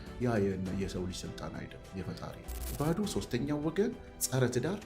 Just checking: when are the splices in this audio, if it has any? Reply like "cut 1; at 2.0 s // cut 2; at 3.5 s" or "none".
cut 1; at 2.7 s